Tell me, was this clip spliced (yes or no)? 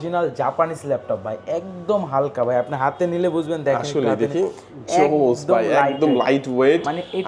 no